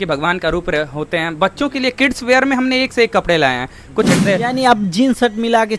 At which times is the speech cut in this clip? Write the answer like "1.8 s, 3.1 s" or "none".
4.1 s